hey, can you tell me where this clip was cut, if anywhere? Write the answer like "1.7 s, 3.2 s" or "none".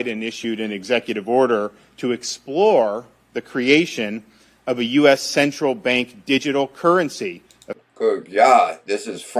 none